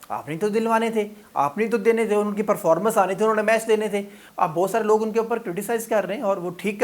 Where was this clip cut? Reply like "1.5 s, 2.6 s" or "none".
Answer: 4.2 s